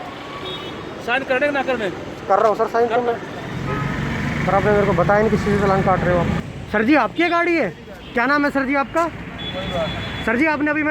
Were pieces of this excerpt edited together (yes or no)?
yes